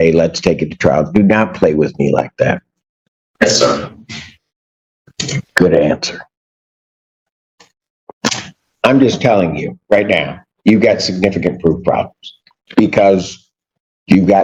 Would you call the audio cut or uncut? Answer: uncut